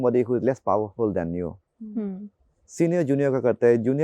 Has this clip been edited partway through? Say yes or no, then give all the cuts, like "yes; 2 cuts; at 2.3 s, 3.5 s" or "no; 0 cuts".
no; 0 cuts